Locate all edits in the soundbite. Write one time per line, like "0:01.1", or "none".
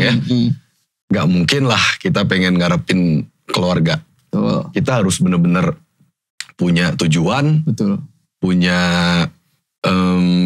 none